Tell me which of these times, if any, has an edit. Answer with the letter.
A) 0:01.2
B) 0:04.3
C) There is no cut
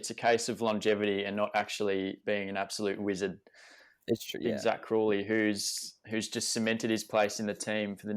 B